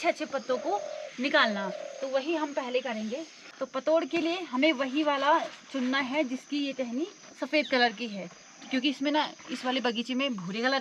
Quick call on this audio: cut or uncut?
uncut